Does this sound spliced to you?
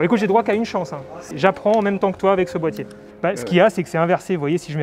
yes; 1 cut; at 3.0 s

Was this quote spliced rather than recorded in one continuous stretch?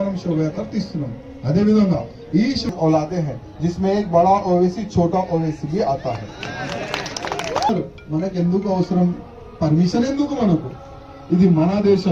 yes; 2 cuts; at 2.7 s, 7.7 s

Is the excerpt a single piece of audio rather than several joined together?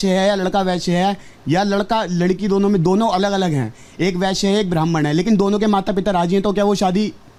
yes; 0 cuts

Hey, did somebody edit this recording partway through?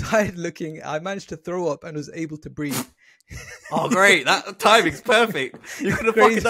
no; 0 cuts

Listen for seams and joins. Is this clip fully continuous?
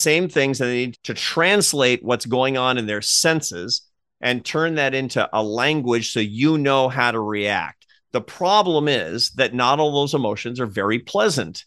no; 1 cut; at 0.9 s

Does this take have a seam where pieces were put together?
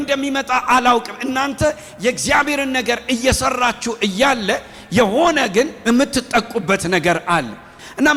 no; 0 cuts

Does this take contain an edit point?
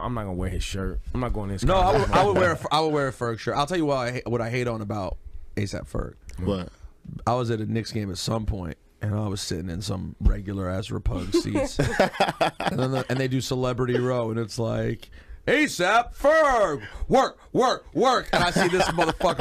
yes; 1 cut; at 15.6 s

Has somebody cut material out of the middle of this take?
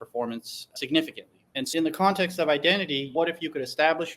yes; 2 cuts; at 1.6 s, 3.1 s

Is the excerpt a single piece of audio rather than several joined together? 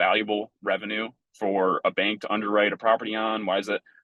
yes; 0 cuts

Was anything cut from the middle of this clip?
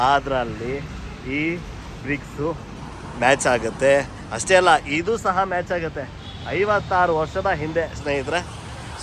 no; 0 cuts

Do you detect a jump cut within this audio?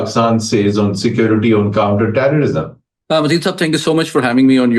no; 0 cuts

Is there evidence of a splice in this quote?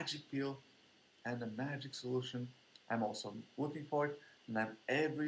no; 0 cuts

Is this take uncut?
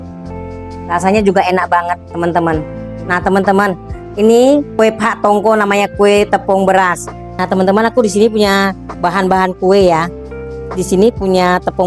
yes; 0 cuts

